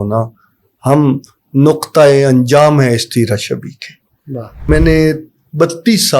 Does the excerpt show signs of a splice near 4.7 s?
yes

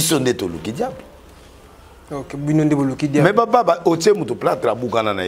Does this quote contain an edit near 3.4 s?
no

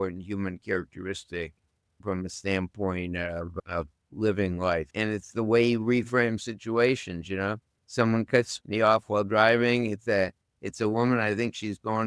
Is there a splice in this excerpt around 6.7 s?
no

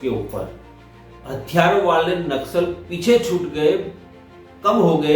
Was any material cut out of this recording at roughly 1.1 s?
yes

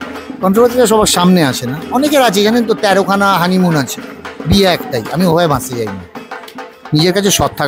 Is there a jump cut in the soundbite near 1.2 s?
no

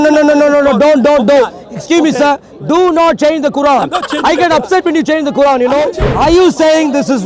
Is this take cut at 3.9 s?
no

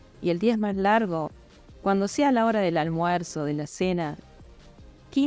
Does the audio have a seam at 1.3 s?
yes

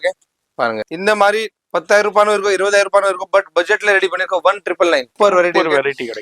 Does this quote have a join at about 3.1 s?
no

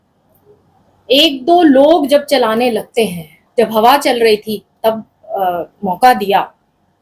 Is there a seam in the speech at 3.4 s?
yes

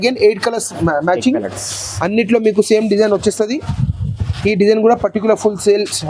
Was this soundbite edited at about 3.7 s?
no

